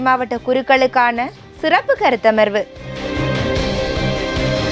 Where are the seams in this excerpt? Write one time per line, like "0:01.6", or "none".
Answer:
0:02.9